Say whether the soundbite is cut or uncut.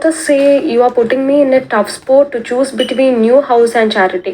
cut